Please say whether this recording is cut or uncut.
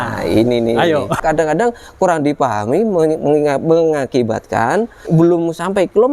cut